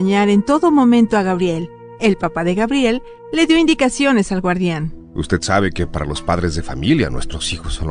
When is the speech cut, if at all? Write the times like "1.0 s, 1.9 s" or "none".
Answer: 2.0 s, 4.9 s